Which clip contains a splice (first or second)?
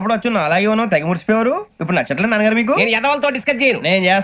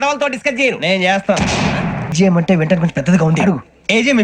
second